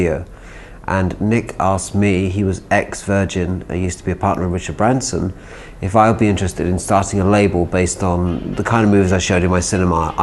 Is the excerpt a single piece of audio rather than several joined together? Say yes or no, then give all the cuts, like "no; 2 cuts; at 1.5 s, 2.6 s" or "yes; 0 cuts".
yes; 0 cuts